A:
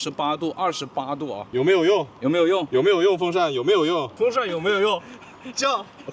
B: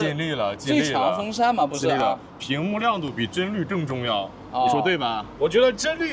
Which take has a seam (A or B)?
A